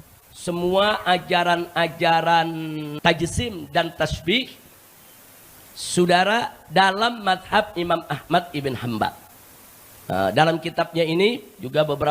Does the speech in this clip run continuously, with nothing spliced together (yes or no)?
no